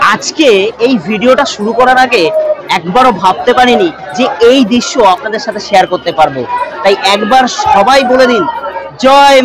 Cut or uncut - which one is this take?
uncut